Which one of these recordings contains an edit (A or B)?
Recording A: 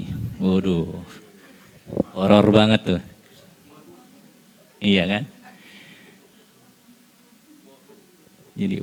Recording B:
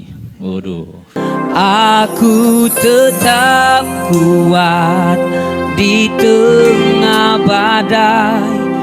B